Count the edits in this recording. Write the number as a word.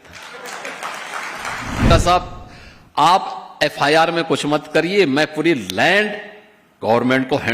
one